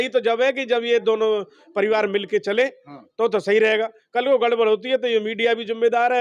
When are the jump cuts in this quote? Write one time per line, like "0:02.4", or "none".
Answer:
none